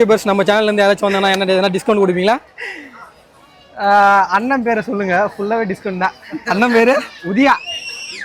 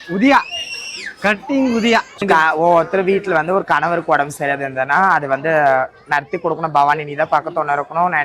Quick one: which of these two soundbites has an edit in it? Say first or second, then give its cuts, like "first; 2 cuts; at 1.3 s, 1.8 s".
second; 1 cut; at 2.2 s